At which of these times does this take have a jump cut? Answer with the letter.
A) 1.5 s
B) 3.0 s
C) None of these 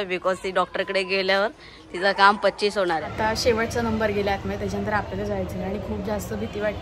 B